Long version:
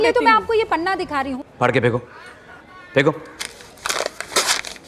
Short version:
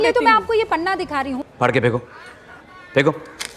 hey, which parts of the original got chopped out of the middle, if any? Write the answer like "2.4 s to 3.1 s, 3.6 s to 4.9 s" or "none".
none

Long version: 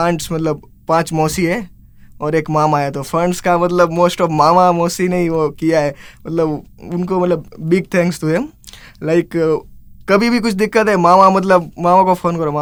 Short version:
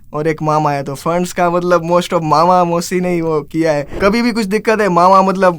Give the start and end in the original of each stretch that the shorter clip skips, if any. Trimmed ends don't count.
6.0 s to 10.0 s

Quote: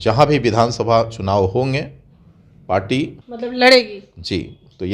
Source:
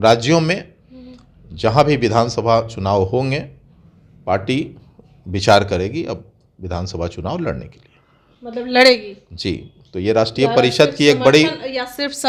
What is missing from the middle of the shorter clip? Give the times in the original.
4.8 s to 8.4 s

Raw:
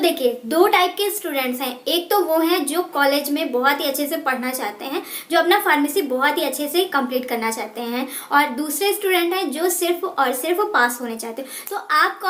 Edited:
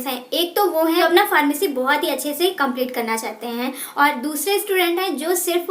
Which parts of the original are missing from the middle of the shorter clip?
2.6 s to 5.4 s

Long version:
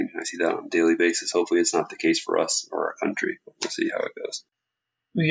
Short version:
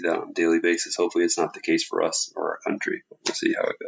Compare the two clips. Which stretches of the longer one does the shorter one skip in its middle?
none

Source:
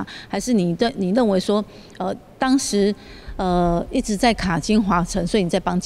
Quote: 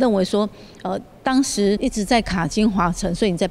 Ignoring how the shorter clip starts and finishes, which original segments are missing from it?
2.9 s to 3.9 s

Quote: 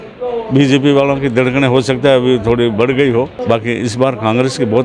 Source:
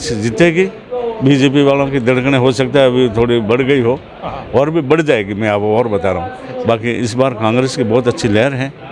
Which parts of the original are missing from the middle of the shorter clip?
4.1 s to 6.5 s

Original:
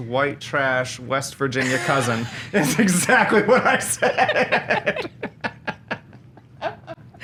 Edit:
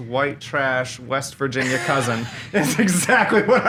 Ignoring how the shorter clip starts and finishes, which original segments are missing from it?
none

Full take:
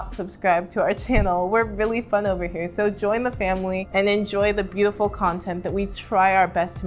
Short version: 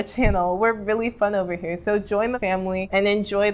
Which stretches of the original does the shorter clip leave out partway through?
3.4 s to 3.5 s

